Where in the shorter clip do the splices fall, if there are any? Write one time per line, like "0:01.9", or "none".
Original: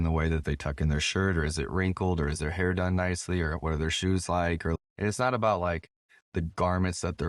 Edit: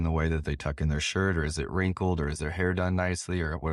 none